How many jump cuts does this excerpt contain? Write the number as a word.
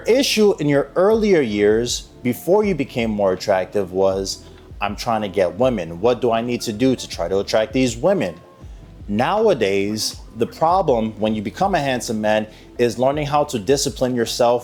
zero